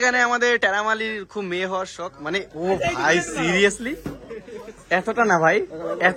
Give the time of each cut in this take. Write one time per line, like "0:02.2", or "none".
none